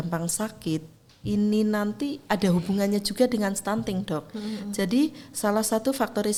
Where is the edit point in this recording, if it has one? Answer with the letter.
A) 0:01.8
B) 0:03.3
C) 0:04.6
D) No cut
D